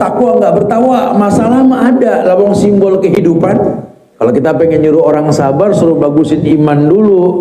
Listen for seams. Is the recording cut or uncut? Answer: cut